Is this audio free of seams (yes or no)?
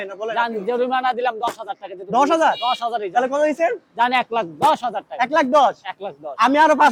yes